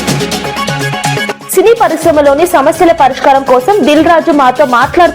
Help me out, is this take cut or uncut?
cut